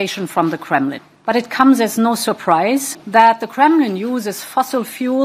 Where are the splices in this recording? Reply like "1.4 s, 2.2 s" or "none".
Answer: 1.1 s, 3.0 s